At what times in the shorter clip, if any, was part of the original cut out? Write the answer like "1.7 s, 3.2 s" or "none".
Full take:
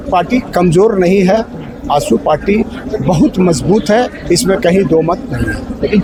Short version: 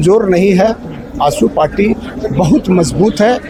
none